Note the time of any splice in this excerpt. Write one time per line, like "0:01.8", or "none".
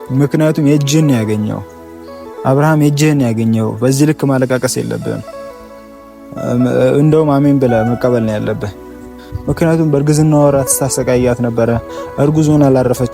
none